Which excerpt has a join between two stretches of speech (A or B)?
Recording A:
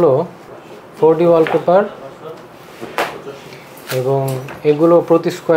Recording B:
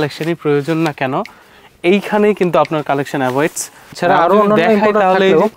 B